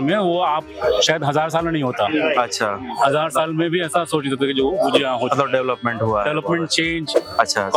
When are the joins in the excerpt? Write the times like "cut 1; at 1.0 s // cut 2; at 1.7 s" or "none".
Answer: none